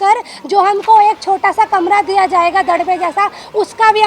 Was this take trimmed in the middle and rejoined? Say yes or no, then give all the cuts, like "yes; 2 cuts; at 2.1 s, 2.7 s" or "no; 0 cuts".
no; 0 cuts